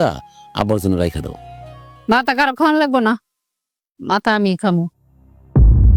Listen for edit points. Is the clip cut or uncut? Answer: uncut